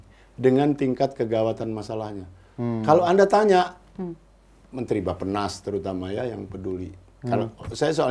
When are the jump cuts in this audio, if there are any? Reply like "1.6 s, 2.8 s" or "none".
none